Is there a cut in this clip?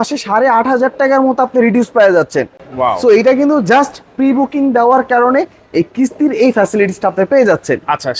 no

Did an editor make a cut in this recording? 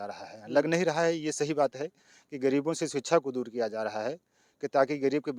no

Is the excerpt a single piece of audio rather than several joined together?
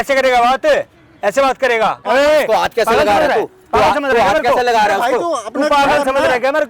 no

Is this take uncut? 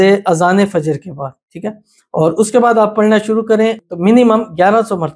no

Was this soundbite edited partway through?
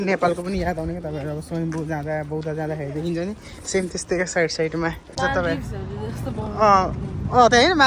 yes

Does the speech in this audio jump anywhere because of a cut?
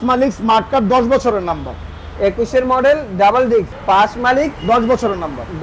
yes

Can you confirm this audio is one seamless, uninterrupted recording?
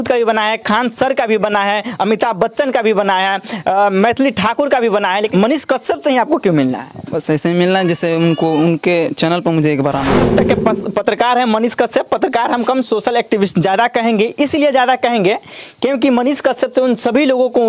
no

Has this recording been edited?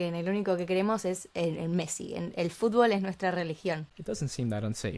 yes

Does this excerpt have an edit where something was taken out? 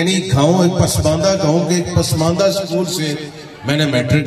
no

